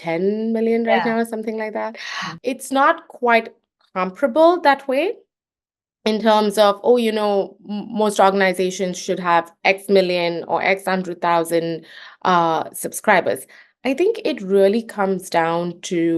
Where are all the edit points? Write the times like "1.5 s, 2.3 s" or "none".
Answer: 2.3 s